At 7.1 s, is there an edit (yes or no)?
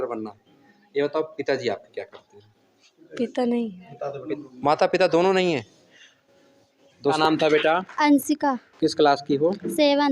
yes